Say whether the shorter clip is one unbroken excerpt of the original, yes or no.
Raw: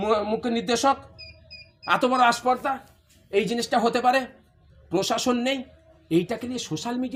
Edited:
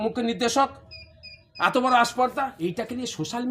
no